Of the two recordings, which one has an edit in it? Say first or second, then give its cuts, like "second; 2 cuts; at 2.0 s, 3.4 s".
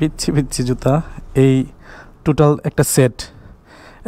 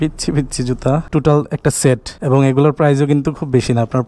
second; 2 cuts; at 1.1 s, 2.1 s